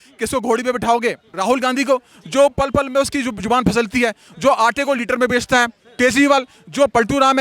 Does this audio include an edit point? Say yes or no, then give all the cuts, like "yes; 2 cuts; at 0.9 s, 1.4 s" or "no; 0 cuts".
yes; 1 cut; at 1.3 s